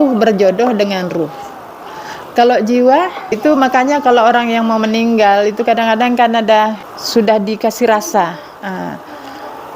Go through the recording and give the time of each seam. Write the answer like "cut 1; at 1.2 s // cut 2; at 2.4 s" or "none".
cut 1; at 3.4 s // cut 2; at 6.9 s